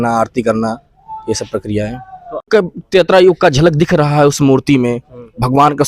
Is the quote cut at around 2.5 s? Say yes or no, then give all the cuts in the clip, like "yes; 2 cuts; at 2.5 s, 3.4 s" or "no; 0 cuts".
yes; 1 cut; at 2.5 s